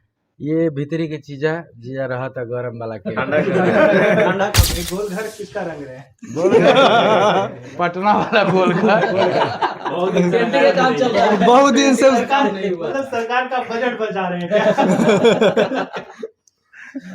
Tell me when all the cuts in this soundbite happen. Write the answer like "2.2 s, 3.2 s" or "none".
4.7 s